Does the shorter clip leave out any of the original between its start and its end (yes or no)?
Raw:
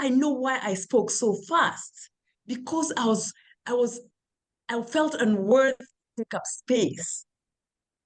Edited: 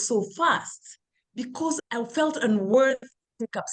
yes